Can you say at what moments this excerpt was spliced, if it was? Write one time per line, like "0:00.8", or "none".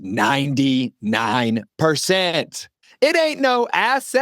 0:02.8